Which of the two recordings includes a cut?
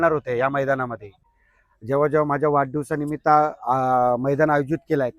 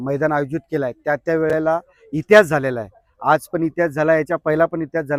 first; 1 cut; at 1.1 s

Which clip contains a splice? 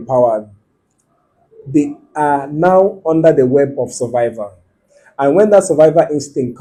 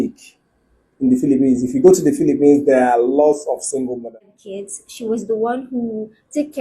second; 1 cut; at 4.0 s

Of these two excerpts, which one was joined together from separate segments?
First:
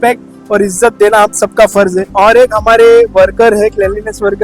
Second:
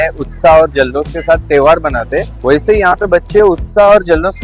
first; 1 cut; at 2.1 s

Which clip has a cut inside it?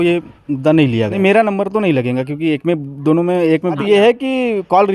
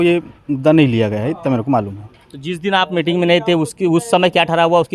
first; 2 cuts; at 1.2 s, 3.8 s

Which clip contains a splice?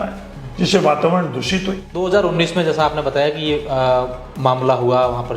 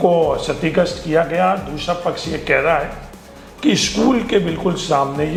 first; 1 cut; at 2.0 s

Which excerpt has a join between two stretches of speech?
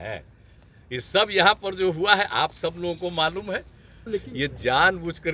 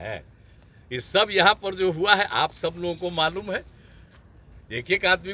first; 1 cut; at 4.1 s

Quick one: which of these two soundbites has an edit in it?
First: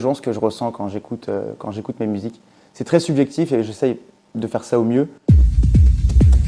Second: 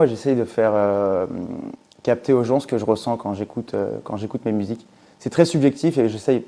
first; 1 cut; at 5.2 s

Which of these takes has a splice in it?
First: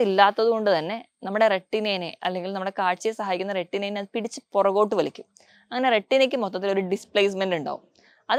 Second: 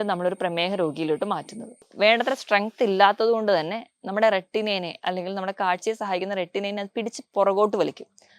second; 1 cut; at 1.9 s

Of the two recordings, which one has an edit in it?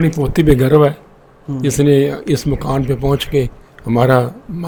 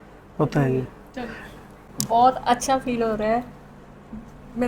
second; 1 cut; at 1.9 s

